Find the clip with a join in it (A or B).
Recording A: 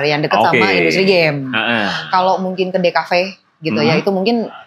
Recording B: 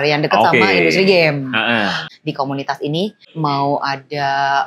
B